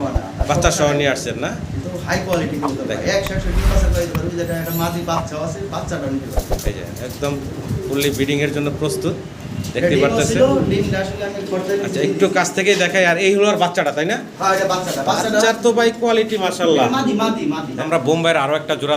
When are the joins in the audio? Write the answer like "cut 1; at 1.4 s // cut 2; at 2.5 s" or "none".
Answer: cut 1; at 17.7 s